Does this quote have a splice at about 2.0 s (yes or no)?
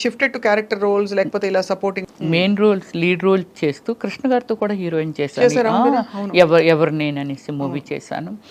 yes